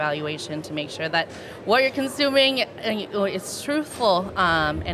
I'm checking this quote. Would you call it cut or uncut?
uncut